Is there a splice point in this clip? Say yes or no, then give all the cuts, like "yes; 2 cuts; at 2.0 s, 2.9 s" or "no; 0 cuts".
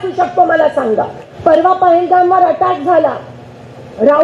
yes; 1 cut; at 1.2 s